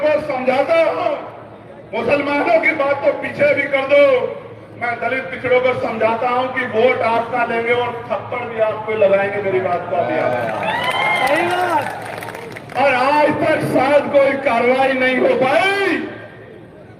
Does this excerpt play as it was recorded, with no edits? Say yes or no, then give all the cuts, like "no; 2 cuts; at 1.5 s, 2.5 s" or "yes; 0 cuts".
yes; 0 cuts